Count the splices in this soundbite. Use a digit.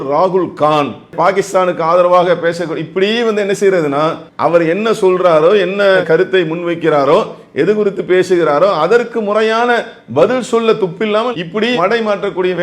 2